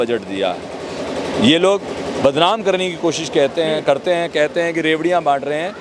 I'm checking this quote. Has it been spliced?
no; 0 cuts

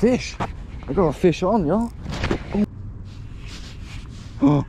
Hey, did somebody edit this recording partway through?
yes; 1 cut; at 2.6 s

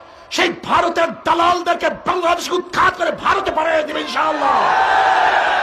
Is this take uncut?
yes; 0 cuts

